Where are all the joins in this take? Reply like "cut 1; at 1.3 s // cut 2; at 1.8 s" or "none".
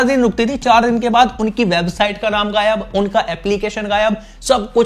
none